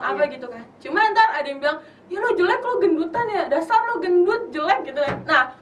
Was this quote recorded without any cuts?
yes; 0 cuts

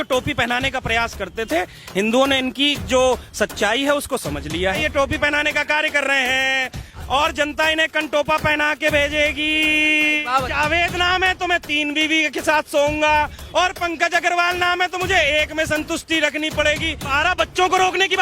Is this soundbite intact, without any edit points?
no; 3 cuts; at 4.8 s, 10.5 s, 17.1 s

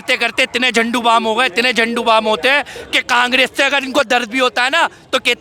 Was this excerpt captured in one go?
yes; 0 cuts

